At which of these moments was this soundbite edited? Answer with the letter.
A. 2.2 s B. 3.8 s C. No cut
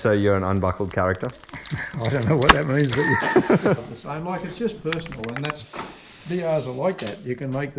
B